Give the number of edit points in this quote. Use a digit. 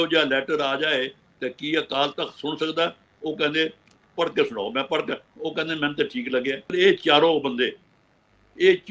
1